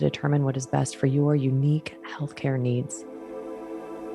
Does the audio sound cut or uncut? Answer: cut